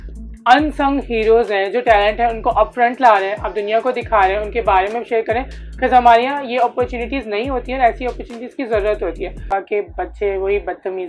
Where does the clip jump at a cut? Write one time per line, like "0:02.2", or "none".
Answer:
0:09.5